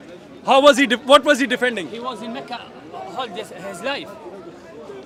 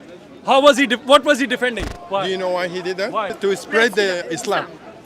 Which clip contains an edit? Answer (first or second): second